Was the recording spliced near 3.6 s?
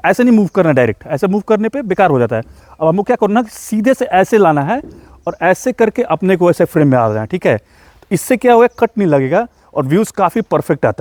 no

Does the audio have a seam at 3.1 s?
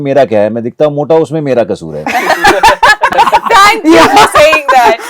yes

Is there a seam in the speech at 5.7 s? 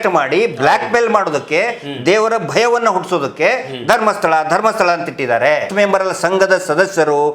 yes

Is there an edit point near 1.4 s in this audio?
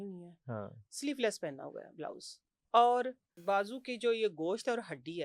no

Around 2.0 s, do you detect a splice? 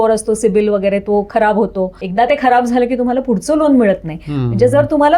yes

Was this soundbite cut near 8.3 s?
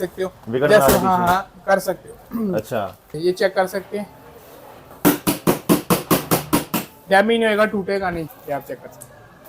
yes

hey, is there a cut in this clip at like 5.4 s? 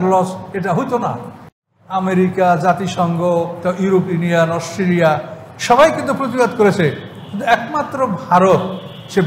no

